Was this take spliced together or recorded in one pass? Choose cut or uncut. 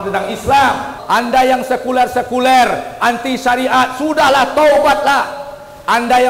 cut